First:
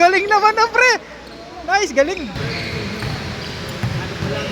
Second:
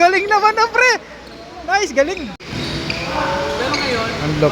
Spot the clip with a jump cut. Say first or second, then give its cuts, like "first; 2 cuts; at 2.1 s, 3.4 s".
first; 1 cut; at 2.4 s